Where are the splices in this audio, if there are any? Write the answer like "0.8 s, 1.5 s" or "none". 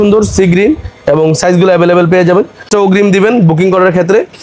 2.7 s